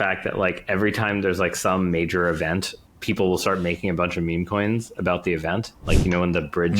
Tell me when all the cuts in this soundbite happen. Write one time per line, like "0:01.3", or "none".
0:02.8
0:05.8

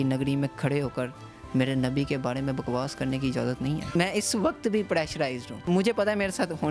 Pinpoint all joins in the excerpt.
0:03.9
0:05.7

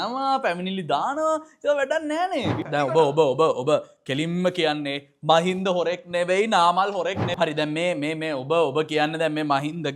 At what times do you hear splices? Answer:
0:02.6
0:07.2

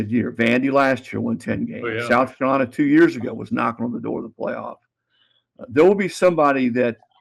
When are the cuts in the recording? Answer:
none

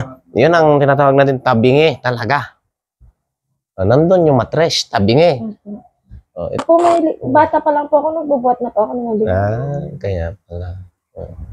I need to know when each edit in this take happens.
0:06.6

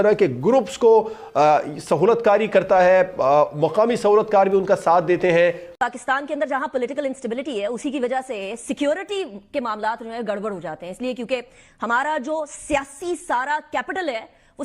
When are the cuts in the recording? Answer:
0:05.6

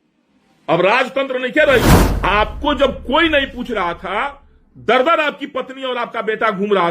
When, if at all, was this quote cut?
0:02.0

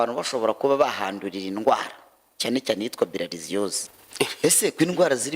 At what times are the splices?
0:03.8

